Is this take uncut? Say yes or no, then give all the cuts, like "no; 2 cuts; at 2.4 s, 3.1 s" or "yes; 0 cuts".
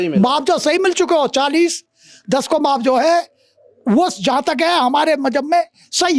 yes; 0 cuts